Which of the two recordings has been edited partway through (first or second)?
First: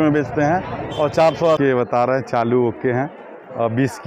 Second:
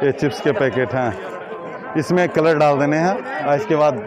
first